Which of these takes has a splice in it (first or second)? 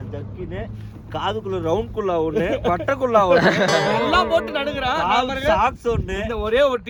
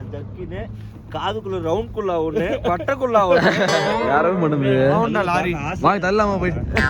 second